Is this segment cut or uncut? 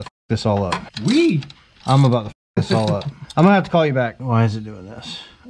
cut